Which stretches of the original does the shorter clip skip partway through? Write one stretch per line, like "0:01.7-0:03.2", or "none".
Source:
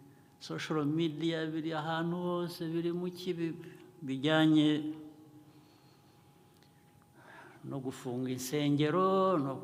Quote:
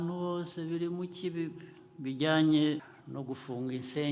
0:04.9-0:07.4